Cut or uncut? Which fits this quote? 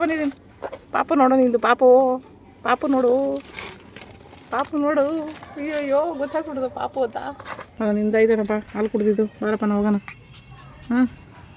cut